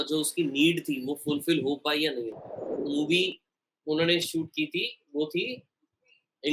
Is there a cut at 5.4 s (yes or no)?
no